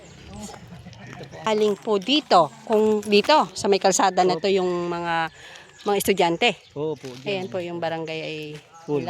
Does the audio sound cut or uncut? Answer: cut